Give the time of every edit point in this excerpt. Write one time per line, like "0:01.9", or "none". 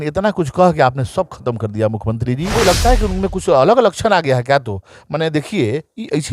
0:02.5